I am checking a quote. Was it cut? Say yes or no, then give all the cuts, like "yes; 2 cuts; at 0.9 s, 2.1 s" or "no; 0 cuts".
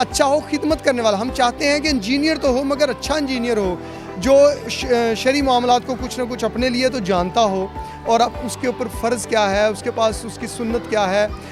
no; 0 cuts